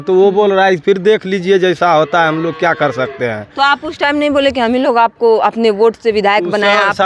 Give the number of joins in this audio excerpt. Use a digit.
0